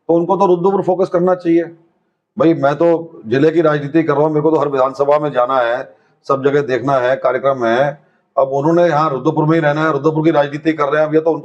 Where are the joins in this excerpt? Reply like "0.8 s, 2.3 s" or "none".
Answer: none